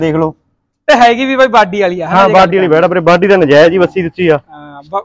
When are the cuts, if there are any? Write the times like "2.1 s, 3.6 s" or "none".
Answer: none